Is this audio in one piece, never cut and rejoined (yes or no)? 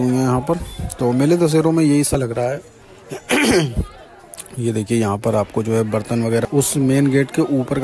no